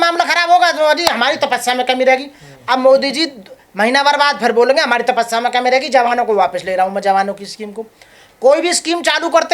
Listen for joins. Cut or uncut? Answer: uncut